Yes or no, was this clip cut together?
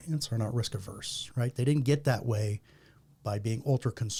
no